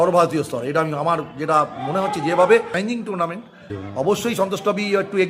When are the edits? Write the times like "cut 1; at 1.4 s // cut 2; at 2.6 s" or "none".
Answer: cut 1; at 2.7 s